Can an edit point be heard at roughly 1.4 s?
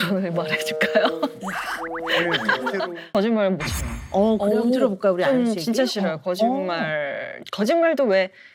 no; 1 cut; at 3.1 s

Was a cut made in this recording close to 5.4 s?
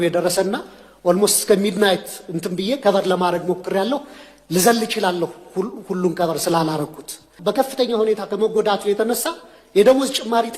no; 1 cut; at 7.3 s

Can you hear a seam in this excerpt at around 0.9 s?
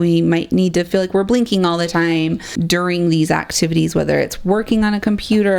no; 1 cut; at 2.6 s

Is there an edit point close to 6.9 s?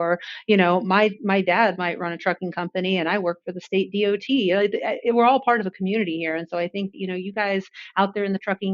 yes; 1 cut; at 6.9 s

